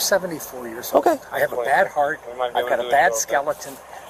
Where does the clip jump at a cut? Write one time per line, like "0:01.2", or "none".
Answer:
none